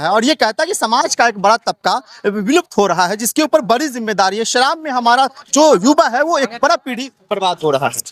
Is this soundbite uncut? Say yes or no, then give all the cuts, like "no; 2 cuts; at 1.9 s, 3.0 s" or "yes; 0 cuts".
yes; 0 cuts